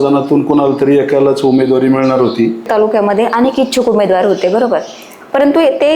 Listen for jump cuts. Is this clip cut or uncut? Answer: cut